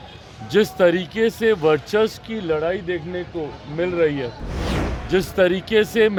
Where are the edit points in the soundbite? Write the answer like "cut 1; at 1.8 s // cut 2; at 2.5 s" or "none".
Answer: none